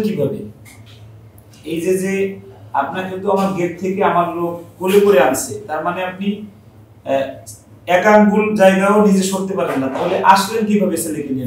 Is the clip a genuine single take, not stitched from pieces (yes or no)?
yes